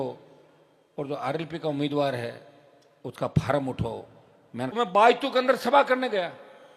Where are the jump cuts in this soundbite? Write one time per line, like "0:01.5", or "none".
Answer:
0:04.7